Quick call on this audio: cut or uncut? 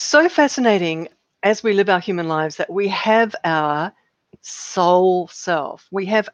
cut